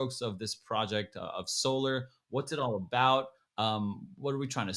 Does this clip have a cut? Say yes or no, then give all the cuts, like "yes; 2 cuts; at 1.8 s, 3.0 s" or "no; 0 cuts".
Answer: no; 0 cuts